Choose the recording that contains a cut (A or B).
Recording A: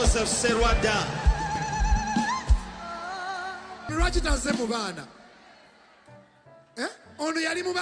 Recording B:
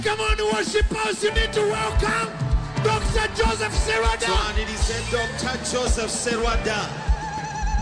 A